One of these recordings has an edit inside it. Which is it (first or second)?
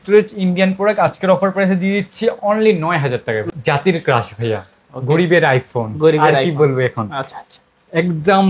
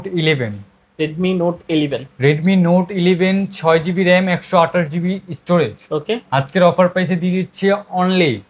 first